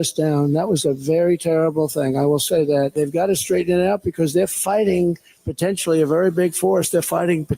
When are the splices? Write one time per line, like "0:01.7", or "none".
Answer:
0:02.9